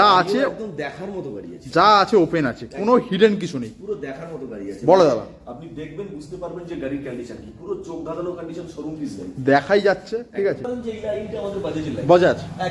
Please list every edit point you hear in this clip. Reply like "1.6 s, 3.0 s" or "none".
10.6 s